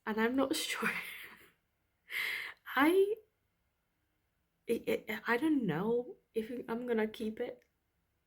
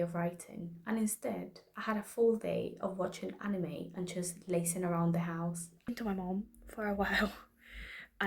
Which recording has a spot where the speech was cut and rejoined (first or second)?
second